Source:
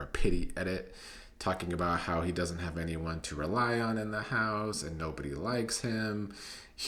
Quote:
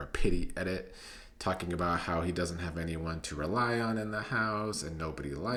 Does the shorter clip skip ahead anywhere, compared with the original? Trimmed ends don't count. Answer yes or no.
no